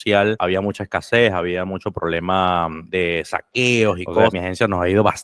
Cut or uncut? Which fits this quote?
cut